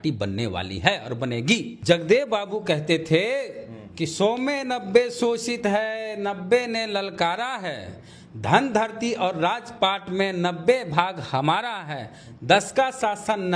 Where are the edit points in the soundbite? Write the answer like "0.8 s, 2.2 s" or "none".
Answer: 1.7 s